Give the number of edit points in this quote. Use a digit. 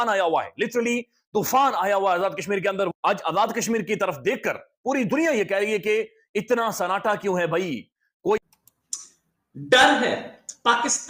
1